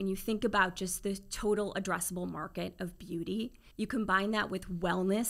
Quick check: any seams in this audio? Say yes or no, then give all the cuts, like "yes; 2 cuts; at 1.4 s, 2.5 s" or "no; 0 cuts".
yes; 1 cut; at 3.6 s